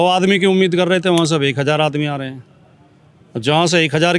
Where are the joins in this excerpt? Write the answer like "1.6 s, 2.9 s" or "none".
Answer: none

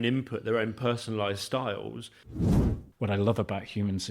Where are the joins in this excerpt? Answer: 2.4 s

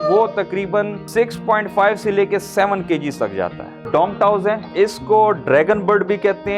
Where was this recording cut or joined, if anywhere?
1.0 s, 3.8 s, 4.7 s

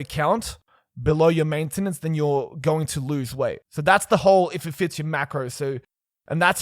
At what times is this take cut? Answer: 3.7 s

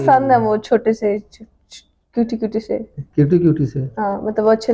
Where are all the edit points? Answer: none

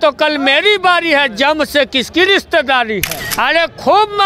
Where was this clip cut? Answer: 3.2 s

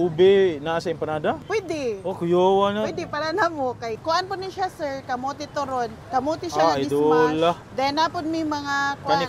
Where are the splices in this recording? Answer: 1.4 s, 4.0 s, 6.0 s, 7.7 s

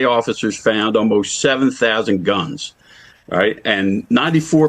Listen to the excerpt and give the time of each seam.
none

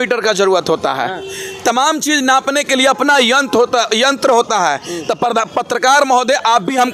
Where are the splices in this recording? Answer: none

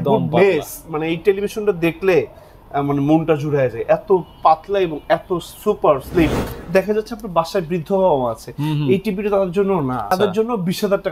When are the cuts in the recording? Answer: 6.5 s, 10.1 s

